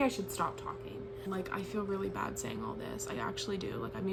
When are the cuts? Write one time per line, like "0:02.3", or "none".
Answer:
none